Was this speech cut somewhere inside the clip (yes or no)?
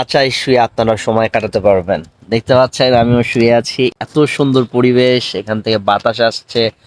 yes